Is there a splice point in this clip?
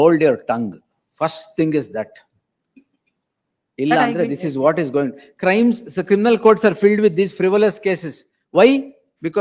no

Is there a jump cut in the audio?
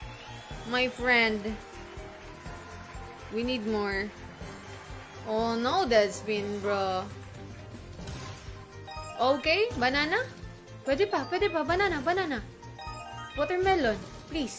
yes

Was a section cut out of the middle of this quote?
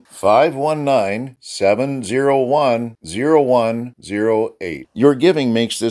no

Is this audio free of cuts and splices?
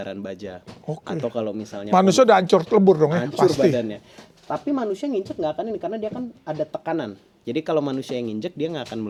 yes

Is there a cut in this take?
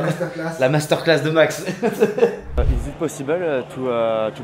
yes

